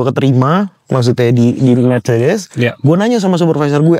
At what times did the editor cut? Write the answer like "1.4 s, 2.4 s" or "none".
none